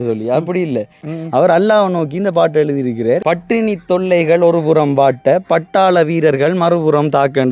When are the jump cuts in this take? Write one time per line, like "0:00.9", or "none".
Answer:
0:00.8
0:03.2